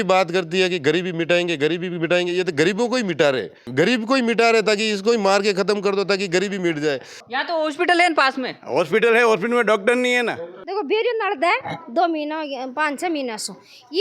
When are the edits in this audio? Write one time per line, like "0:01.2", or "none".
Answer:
0:03.6
0:07.1
0:10.5